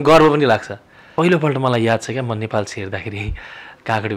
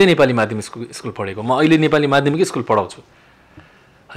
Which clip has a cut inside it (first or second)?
first